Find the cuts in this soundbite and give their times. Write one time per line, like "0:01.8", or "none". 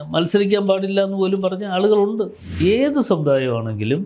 0:02.6